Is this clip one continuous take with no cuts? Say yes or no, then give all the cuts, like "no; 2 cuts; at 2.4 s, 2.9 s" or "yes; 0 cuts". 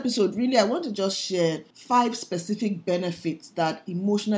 no; 1 cut; at 1.7 s